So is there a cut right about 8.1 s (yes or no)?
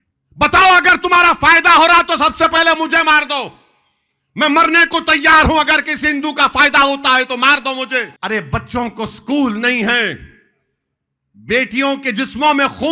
yes